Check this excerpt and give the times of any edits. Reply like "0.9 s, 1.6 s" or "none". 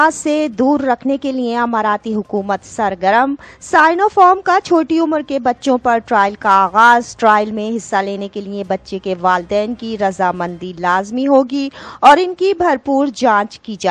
none